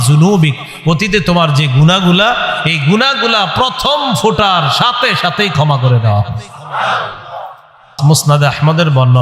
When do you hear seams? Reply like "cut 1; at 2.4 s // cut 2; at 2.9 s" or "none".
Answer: cut 1; at 7.9 s